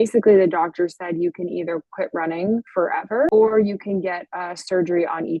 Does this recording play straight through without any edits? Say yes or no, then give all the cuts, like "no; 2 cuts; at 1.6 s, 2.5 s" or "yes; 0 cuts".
no; 1 cut; at 3.3 s